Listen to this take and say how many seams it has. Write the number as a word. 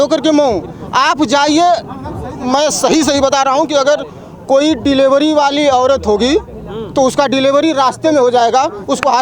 zero